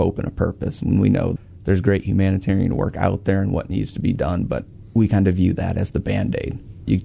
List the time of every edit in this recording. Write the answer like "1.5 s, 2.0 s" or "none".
none